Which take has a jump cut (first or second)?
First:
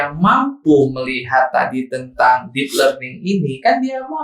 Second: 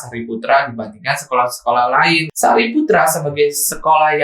second